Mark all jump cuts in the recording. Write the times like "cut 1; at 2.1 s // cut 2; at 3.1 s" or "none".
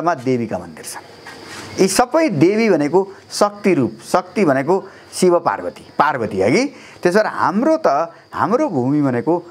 none